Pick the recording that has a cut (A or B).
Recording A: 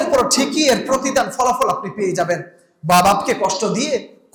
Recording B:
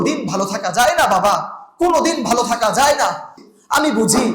B